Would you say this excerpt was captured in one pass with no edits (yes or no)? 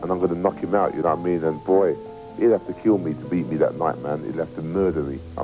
no